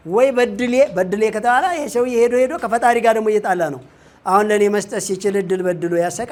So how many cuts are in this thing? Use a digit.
0